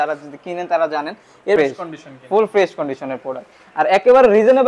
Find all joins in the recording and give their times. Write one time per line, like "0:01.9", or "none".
0:01.6